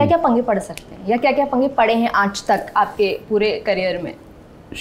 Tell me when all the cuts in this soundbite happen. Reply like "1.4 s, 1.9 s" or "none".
none